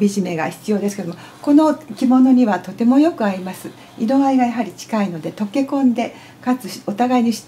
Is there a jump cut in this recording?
no; 0 cuts

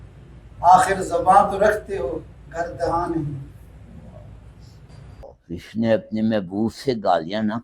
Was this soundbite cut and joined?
yes; 1 cut; at 4.9 s

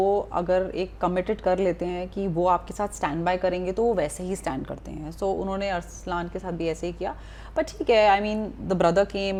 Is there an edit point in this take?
no; 0 cuts

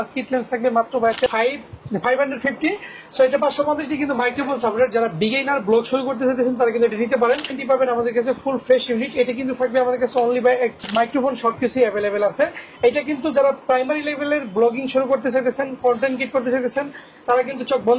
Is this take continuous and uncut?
no; 3 cuts; at 1.3 s, 7.6 s, 10.8 s

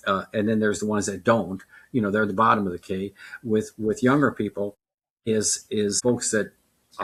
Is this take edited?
no; 0 cuts

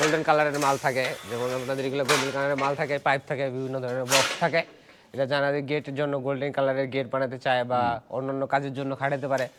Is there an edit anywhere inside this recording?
no; 0 cuts

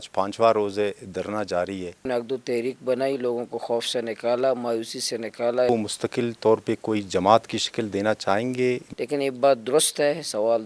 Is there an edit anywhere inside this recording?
yes; 3 cuts; at 2.0 s, 5.7 s, 8.8 s

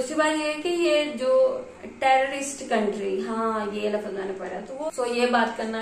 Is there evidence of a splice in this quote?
yes; 1 cut; at 4.8 s

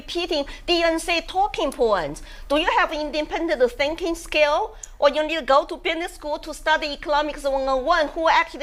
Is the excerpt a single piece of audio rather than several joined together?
yes; 0 cuts

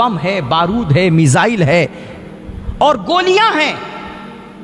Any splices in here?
no; 0 cuts

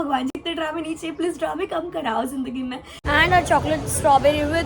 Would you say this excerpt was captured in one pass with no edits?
no; 1 cut; at 3.0 s

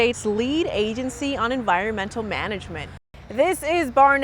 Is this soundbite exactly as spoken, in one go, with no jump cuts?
no; 1 cut; at 2.9 s

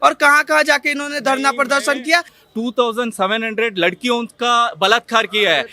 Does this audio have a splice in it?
yes; 1 cut; at 2.4 s

